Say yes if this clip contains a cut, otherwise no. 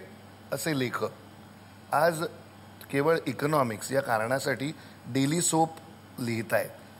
no